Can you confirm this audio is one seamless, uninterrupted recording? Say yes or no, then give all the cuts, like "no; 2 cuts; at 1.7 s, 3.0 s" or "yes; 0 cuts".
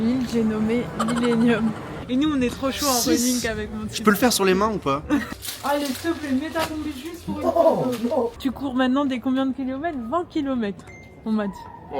no; 3 cuts; at 1.9 s, 5.3 s, 8.3 s